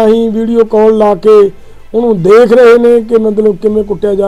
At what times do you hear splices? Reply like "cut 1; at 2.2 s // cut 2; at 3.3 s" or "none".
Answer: none